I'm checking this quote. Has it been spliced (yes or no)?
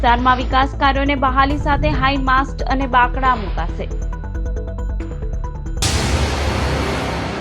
yes